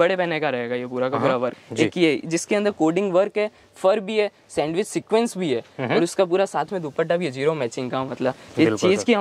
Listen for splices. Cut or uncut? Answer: cut